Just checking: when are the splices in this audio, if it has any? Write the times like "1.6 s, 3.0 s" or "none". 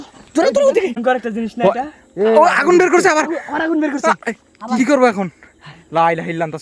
1.0 s